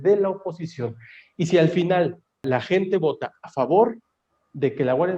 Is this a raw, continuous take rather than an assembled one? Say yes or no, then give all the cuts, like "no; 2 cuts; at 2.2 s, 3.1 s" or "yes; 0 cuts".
no; 1 cut; at 2.4 s